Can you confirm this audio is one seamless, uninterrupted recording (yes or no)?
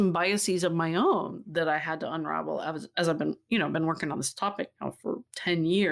yes